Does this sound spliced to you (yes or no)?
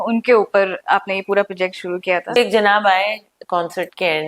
yes